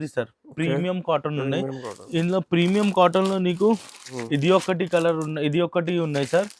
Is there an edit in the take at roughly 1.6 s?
no; 1 cut; at 4.2 s

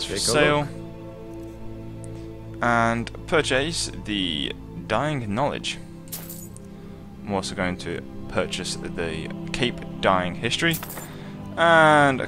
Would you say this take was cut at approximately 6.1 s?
yes; 1 cut; at 6.1 s

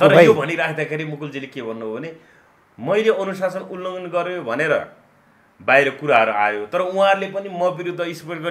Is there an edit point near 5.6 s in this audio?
no; 0 cuts

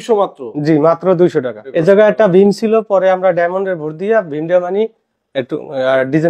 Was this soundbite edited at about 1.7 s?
yes; 1 cut; at 1.7 s

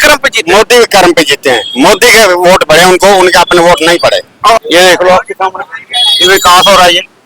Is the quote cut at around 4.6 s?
yes; 1 cut; at 4.6 s

